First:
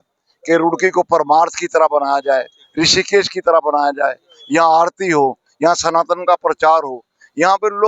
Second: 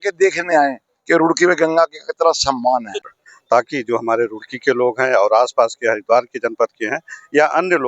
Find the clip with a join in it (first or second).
second